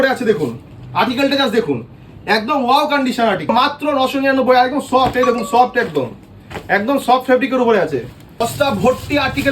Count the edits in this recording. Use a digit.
2